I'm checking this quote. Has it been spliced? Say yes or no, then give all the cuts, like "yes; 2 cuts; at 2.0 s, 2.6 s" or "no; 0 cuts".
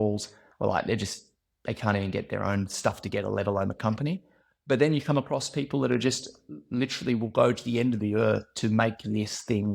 no; 0 cuts